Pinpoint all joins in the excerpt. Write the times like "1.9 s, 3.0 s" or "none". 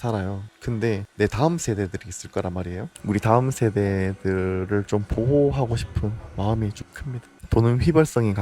2.9 s, 7.4 s

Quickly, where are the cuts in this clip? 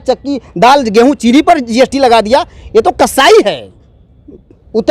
none

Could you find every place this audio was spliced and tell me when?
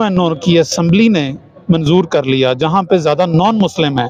none

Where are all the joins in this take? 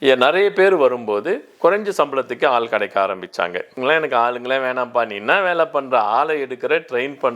3.7 s

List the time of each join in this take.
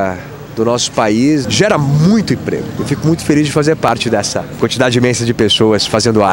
1.4 s, 2.7 s, 3.9 s

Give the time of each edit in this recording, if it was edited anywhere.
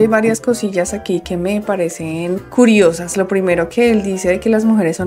none

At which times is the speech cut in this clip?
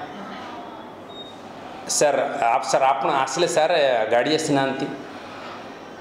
none

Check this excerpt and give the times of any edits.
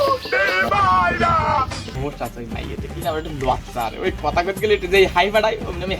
1.8 s

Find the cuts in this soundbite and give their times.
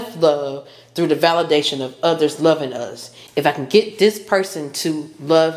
none

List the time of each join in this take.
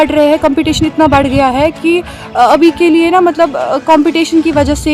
none

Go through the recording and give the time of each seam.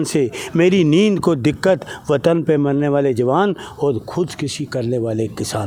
none

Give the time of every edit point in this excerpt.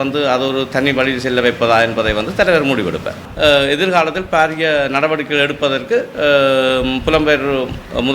3.3 s

